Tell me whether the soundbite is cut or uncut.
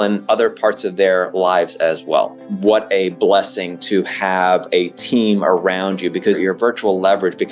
cut